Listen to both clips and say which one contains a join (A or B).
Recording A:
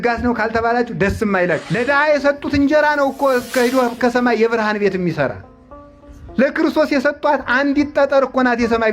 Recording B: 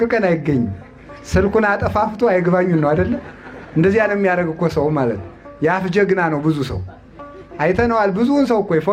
A